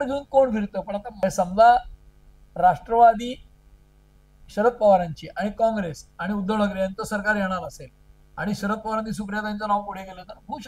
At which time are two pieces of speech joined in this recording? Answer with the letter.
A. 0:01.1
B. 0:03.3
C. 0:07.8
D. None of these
A